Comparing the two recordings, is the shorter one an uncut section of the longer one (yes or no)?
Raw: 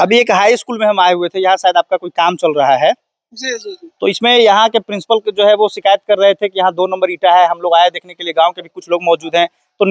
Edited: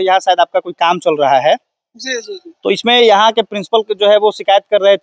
yes